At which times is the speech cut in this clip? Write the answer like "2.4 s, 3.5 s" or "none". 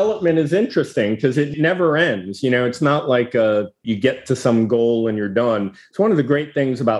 1.5 s, 3.8 s